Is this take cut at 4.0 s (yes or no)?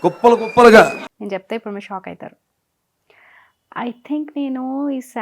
no